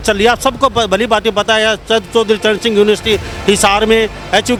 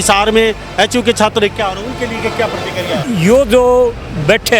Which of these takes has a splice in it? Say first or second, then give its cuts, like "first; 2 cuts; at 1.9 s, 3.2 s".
second; 1 cut; at 3.0 s